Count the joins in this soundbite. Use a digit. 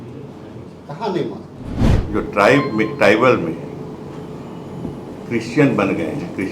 1